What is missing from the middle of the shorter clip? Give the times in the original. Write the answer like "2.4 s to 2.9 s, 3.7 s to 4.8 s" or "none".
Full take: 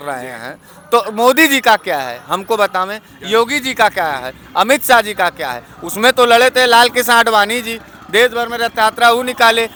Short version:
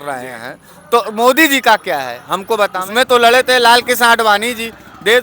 2.8 s to 5.9 s